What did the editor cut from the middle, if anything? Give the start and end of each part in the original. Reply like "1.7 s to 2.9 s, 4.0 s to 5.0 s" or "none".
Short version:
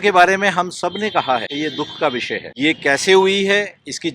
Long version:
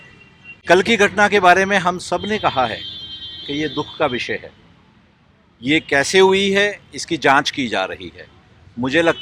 2.8 s to 3.5 s, 4.5 s to 5.6 s